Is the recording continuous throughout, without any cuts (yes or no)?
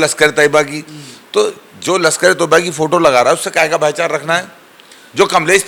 yes